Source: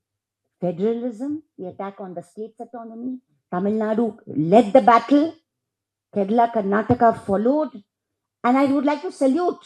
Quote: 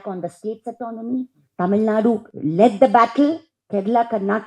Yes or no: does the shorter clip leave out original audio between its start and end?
yes